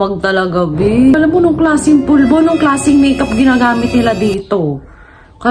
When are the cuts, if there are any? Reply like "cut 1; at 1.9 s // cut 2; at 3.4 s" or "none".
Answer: cut 1; at 1.2 s